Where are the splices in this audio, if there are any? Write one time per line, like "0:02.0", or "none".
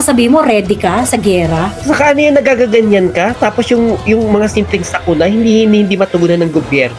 0:01.8